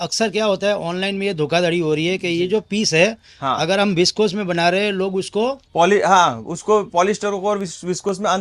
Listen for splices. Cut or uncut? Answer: uncut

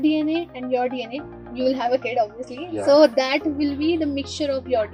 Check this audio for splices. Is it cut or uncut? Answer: uncut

